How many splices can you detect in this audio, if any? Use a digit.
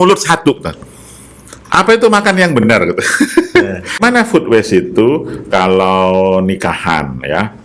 1